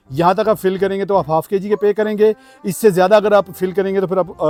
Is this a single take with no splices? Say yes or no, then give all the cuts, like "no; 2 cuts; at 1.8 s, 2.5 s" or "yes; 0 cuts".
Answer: yes; 0 cuts